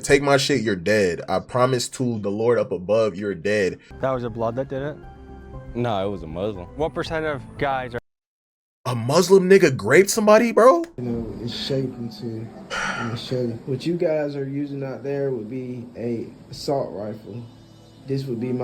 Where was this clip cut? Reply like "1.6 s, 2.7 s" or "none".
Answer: 3.9 s, 10.9 s